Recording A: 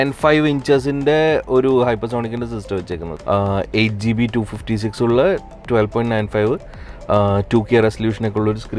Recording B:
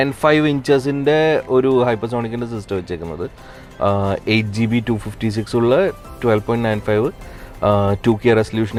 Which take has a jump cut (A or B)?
A